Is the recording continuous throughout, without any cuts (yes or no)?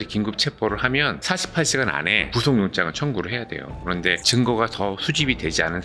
yes